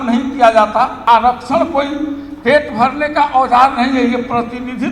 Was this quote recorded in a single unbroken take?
no; 1 cut; at 1.0 s

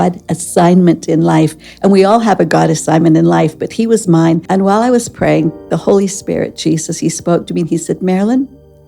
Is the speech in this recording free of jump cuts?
no; 1 cut; at 4.4 s

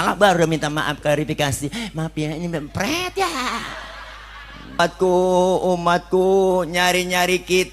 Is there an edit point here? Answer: yes; 1 cut; at 4.8 s

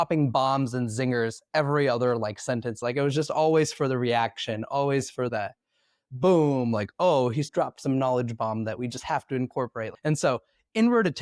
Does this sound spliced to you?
yes; 3 cuts; at 2.8 s, 7.5 s, 9.9 s

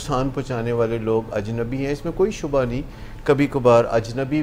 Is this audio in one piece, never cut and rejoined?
yes; 0 cuts

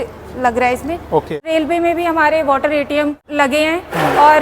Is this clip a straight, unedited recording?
no; 2 cuts; at 1.4 s, 3.2 s

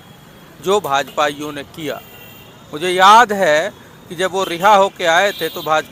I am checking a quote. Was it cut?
no; 0 cuts

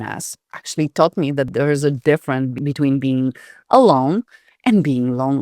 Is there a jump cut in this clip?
yes; 2 cuts; at 1.5 s, 2.6 s

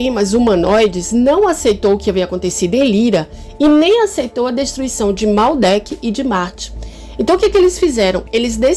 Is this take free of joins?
yes; 0 cuts

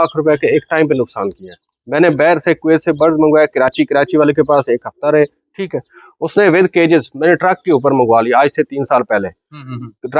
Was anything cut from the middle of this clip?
no; 0 cuts

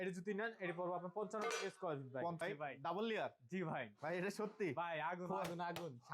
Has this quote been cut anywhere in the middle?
yes; 1 cut; at 2.4 s

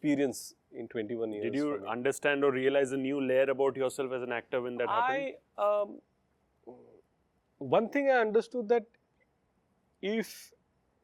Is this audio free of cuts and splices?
yes; 0 cuts

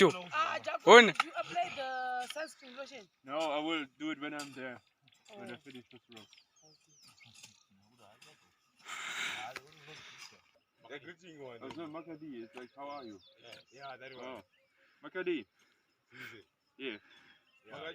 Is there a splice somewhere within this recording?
yes; 1 cut; at 10.6 s

